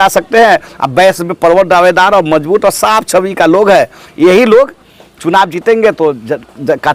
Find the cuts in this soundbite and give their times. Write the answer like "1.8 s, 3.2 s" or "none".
none